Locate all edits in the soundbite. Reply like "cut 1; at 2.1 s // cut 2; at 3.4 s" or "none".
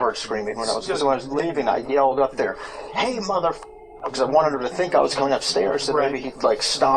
cut 1; at 0.9 s // cut 2; at 4.1 s